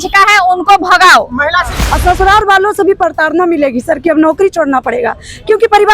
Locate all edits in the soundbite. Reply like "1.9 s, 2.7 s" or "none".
1.8 s